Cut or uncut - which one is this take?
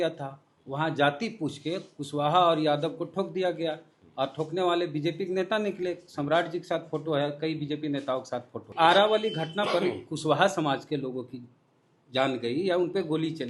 cut